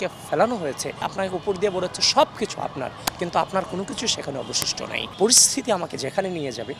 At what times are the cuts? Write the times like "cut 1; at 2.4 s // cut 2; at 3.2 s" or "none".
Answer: cut 1; at 1.0 s // cut 2; at 5.1 s